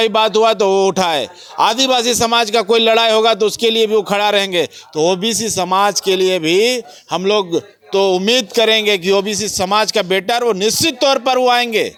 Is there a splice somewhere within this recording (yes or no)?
no